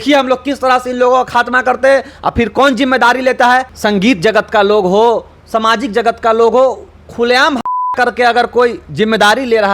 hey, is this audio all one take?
no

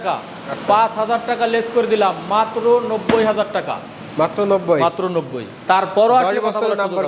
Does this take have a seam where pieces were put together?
no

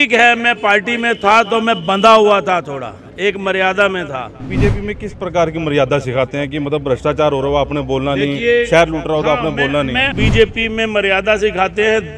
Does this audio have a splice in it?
yes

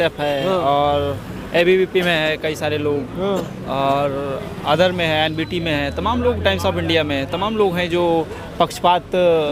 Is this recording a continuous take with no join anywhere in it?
yes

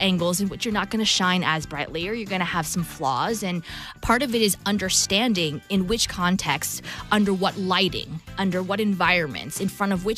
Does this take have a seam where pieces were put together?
no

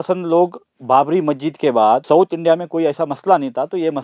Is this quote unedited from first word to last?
no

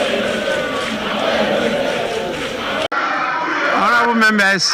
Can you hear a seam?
yes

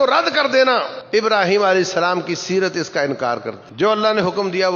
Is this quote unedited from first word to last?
no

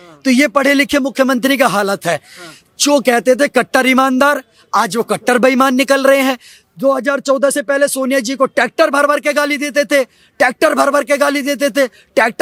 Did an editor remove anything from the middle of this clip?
no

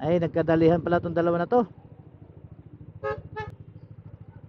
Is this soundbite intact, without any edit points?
no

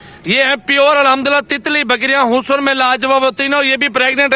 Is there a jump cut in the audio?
no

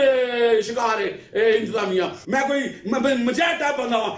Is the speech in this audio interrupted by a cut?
yes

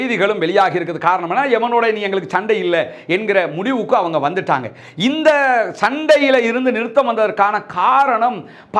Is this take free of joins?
yes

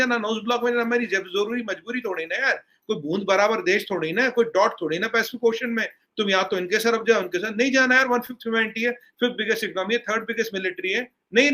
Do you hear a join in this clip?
no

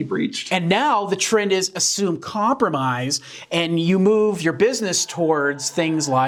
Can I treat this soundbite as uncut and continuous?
yes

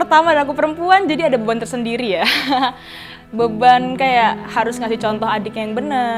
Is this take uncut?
yes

